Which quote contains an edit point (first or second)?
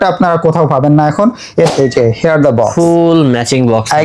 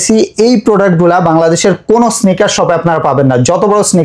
first